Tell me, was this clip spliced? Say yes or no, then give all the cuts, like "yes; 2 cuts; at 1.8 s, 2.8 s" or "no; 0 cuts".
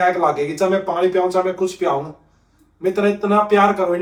no; 0 cuts